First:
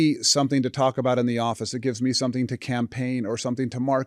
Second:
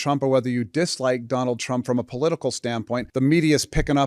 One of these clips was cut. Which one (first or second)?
second